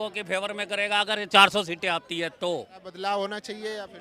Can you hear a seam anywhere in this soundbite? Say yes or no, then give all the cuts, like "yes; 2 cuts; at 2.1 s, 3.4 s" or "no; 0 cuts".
yes; 1 cut; at 2.9 s